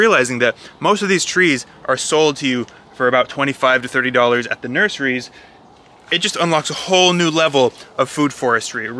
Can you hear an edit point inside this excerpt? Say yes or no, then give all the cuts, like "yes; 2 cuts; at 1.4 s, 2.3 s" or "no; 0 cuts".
no; 0 cuts